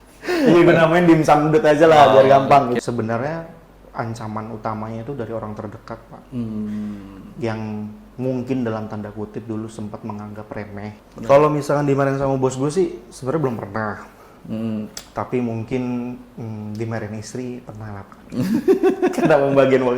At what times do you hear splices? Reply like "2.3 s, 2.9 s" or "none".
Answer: 2.8 s, 11.0 s